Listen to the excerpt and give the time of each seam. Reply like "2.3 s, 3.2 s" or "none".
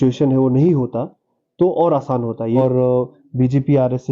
2.6 s

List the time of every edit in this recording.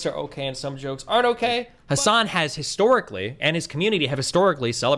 1.7 s

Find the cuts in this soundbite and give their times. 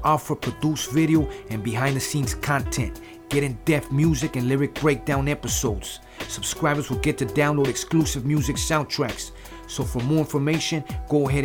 none

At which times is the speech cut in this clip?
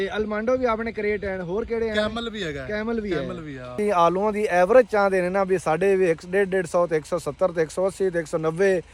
3.8 s

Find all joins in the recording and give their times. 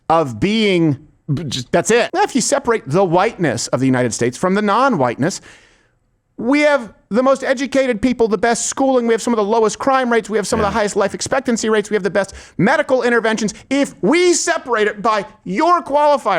2.1 s

